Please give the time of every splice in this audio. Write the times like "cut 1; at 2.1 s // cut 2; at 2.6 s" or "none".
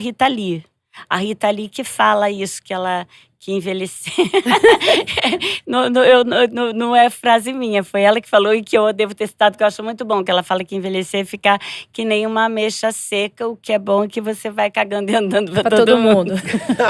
none